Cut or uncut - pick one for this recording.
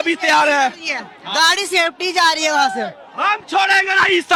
uncut